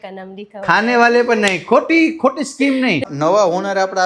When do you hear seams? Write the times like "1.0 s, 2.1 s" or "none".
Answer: 3.0 s